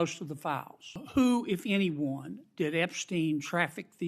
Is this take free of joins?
no; 1 cut; at 1.0 s

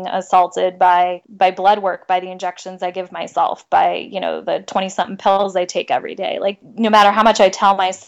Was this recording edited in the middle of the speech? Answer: yes; 2 cuts; at 1.2 s, 6.5 s

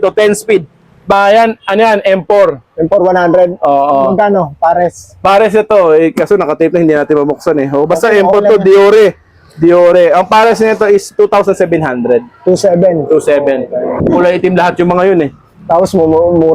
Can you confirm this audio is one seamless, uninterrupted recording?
no; 2 cuts; at 1.1 s, 14.0 s

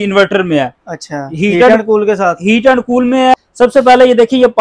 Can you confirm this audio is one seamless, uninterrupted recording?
no; 1 cut; at 3.3 s

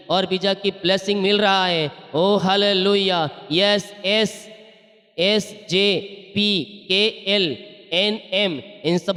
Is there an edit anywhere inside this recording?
no; 0 cuts

